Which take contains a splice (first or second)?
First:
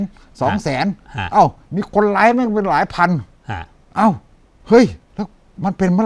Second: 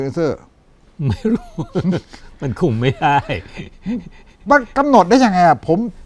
first